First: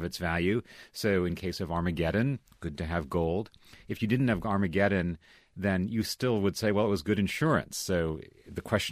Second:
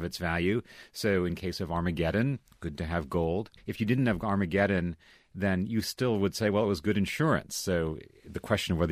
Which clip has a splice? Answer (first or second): second